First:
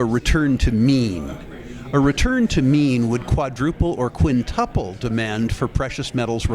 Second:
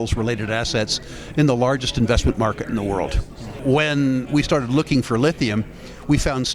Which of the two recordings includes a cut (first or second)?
second